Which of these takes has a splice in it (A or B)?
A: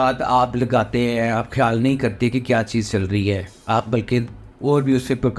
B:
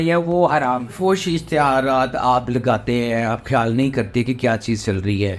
B